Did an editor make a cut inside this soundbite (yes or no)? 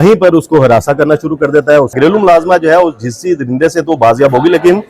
yes